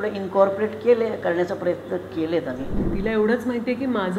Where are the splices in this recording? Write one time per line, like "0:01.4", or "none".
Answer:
0:02.9